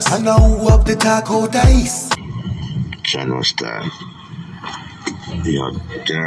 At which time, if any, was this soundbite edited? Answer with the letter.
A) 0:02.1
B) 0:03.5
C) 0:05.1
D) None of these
A